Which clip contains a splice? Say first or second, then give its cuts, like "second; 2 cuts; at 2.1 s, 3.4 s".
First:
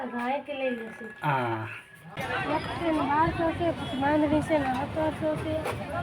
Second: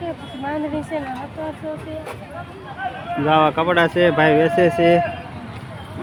first; 1 cut; at 2.2 s